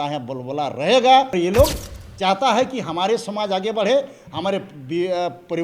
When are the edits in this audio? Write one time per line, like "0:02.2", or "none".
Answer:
0:01.3